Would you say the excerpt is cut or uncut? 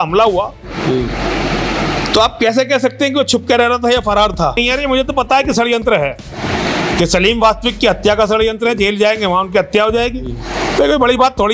cut